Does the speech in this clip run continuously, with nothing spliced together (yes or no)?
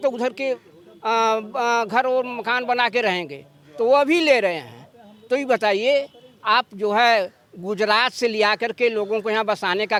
yes